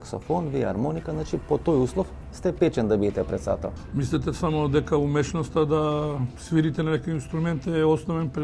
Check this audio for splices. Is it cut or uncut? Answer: cut